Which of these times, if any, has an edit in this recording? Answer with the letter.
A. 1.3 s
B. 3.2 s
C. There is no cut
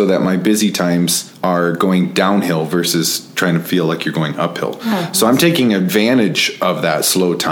A